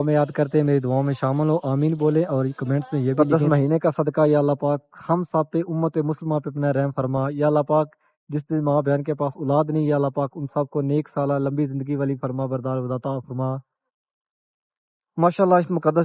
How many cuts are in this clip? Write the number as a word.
one